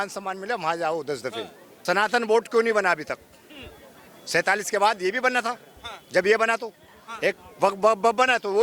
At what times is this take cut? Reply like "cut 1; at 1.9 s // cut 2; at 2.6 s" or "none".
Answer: cut 1; at 1.8 s